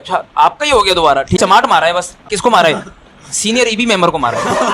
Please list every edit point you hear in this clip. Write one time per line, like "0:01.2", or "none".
0:01.4
0:02.3